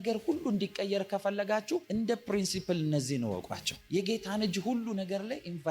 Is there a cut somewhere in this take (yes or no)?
no